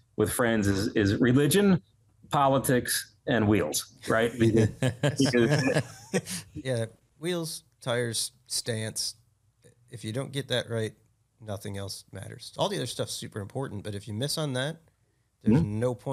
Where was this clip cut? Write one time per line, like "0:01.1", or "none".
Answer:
0:06.4